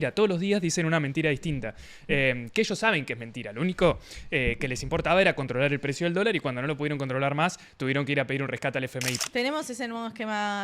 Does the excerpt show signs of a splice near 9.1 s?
yes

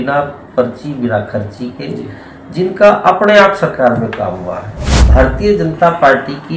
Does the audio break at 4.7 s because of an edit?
yes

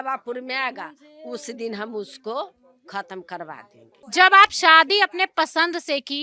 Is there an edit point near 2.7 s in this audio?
no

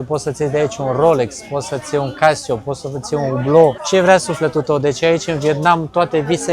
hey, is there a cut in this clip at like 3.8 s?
yes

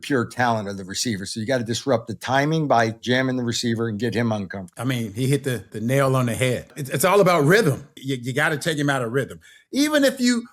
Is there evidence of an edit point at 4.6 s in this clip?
yes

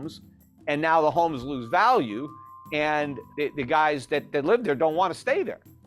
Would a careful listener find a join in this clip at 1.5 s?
no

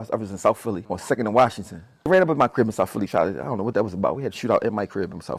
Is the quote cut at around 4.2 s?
no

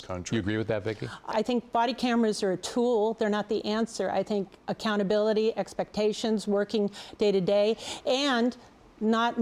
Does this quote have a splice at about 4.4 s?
no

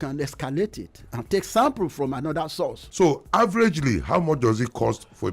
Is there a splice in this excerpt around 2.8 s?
yes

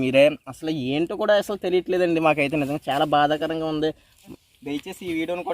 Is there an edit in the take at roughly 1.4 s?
no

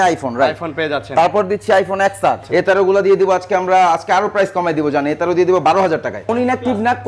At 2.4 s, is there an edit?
yes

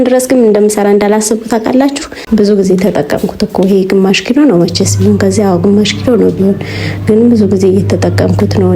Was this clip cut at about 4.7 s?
no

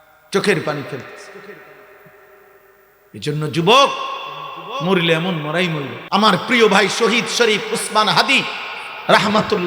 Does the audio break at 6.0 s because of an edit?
yes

